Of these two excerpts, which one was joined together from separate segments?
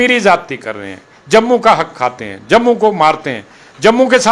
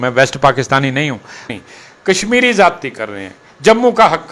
second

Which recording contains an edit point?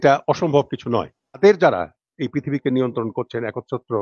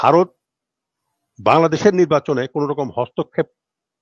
first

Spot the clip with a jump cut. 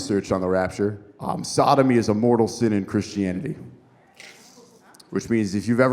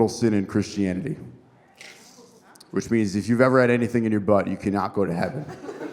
first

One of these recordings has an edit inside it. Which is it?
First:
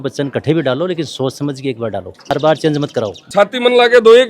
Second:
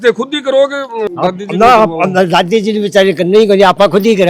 first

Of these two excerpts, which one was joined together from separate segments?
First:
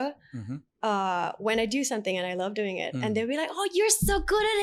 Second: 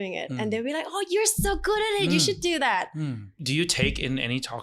second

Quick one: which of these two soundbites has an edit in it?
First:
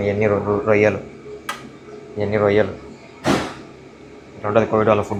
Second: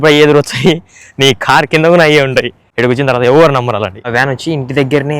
second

